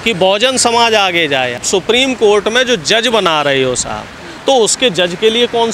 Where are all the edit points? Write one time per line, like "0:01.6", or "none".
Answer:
0:01.6